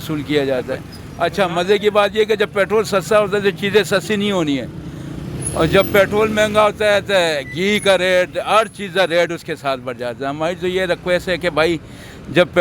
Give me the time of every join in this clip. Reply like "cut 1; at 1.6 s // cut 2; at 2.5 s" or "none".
cut 1; at 1.0 s